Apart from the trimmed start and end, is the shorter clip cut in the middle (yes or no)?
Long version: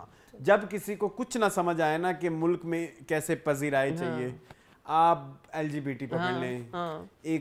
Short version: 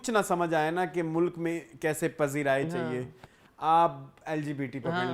no